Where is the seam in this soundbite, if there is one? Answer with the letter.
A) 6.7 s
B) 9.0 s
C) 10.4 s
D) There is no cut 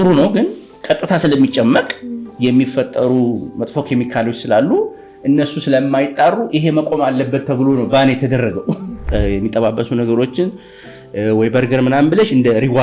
B